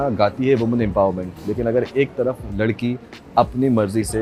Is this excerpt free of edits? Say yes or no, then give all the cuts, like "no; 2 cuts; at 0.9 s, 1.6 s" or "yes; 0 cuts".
yes; 0 cuts